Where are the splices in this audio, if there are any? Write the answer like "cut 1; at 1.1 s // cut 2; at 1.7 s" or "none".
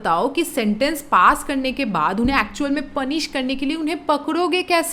none